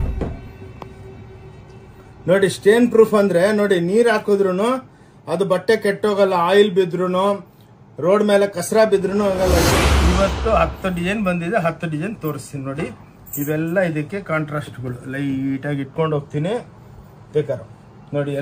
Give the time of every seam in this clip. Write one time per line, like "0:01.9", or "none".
0:09.7

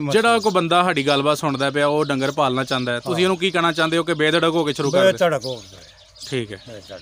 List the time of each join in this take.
none

